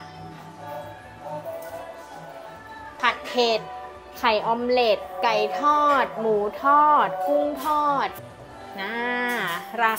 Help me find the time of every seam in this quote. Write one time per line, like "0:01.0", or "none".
0:02.9
0:08.1